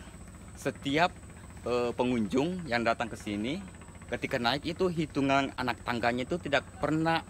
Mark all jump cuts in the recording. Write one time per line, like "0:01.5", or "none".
0:05.6